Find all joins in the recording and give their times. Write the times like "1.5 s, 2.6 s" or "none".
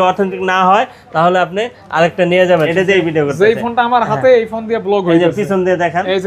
2.7 s